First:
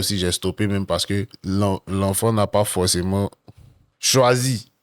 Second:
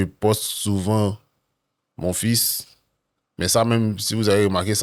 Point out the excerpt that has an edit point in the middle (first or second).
first